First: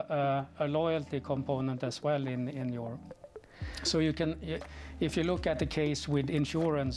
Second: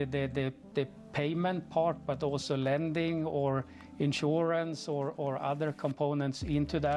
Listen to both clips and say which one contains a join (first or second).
first